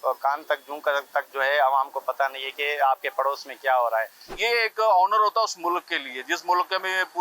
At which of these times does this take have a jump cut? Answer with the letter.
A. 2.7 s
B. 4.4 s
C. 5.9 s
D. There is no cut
B